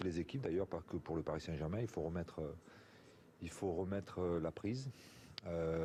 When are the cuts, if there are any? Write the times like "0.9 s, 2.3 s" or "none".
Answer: none